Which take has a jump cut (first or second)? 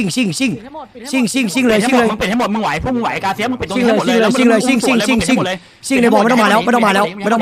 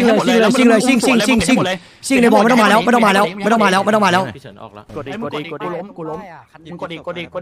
second